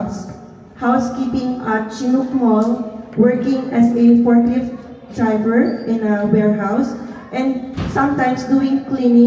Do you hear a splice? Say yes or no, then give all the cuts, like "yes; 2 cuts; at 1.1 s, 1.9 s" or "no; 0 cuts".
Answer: no; 0 cuts